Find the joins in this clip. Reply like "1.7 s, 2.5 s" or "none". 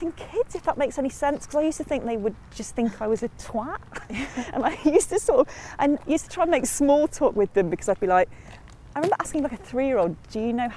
none